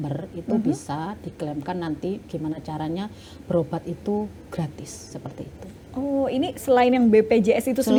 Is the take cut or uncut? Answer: uncut